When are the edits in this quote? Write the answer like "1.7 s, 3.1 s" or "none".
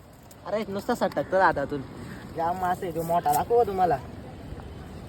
none